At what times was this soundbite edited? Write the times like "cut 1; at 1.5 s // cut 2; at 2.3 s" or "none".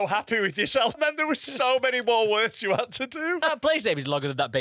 cut 1; at 1.0 s // cut 2; at 3.4 s